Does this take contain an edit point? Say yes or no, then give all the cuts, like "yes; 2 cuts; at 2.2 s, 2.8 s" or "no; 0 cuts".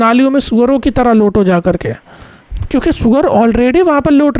no; 0 cuts